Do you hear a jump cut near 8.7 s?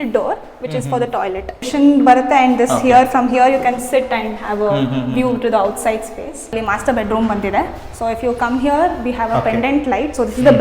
no; 2 cuts; at 1.7 s, 6.5 s

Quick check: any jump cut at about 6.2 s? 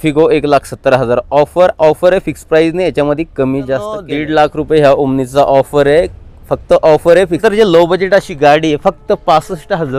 no; 2 cuts; at 4.0 s, 7.4 s

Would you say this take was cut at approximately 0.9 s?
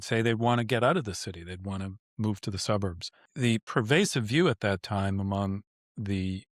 no; 1 cut; at 3.5 s

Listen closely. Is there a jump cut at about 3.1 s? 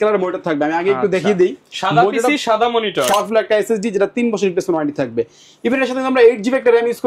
yes; 1 cut; at 3.1 s

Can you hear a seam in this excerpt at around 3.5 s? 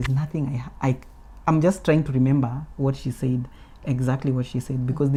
no; 0 cuts

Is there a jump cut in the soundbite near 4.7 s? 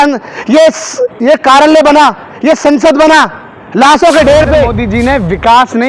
yes; 1 cut; at 4.7 s

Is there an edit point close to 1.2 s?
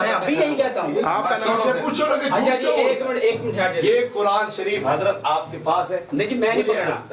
yes; 1 cut; at 1.2 s

